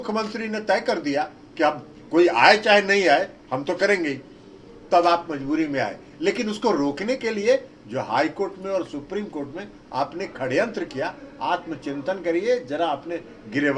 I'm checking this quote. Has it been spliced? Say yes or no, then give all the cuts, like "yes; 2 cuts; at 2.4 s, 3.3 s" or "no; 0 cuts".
no; 0 cuts